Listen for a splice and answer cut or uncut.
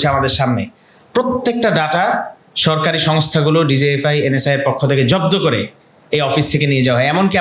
uncut